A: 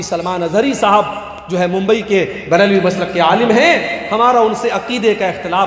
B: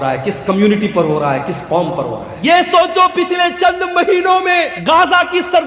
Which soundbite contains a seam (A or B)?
B